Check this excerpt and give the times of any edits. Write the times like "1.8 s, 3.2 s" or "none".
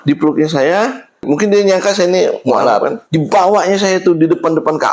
none